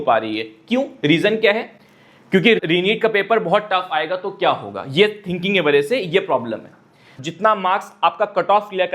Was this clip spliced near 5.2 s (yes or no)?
no